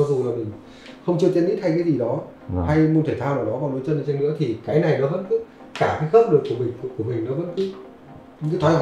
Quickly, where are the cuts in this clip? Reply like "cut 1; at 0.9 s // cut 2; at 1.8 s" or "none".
none